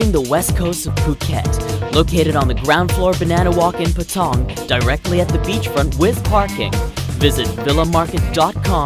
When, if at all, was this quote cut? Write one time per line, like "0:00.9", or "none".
none